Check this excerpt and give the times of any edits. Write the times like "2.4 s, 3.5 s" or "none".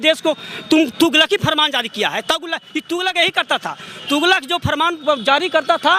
none